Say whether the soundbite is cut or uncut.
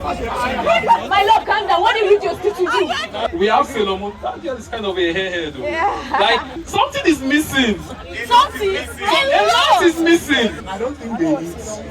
cut